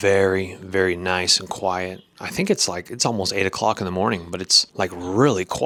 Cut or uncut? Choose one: uncut